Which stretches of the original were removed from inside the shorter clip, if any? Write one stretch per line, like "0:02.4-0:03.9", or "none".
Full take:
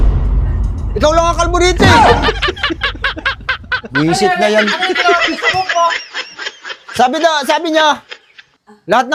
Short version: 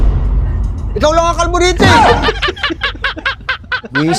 none